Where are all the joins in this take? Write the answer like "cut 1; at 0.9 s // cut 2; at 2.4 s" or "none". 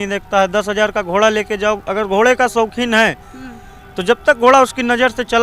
none